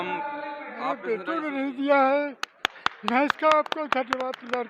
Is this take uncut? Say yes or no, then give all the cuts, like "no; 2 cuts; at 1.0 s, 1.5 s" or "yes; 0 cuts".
no; 1 cut; at 1.0 s